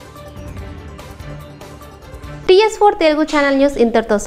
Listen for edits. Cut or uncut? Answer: uncut